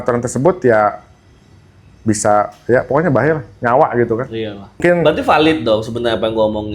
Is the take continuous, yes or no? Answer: no